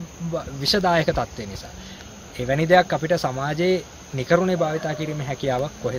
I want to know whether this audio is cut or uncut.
uncut